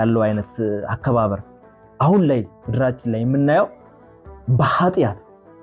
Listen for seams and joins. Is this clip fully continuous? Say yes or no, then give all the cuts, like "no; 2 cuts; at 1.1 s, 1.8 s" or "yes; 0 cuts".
yes; 0 cuts